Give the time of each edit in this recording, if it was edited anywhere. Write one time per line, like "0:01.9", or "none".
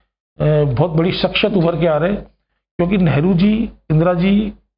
none